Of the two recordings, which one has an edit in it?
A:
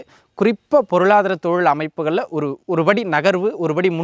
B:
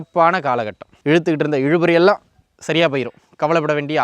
B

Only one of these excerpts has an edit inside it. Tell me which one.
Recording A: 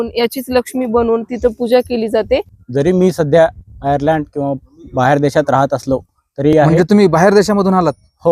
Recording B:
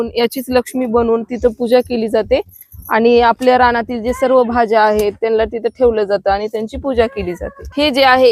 A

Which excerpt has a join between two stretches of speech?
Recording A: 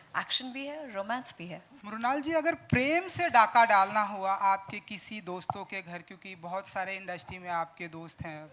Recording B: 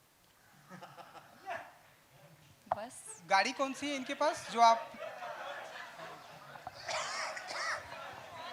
A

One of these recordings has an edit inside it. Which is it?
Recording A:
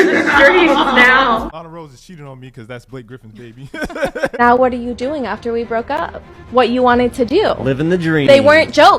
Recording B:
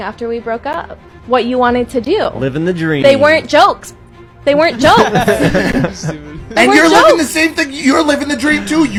A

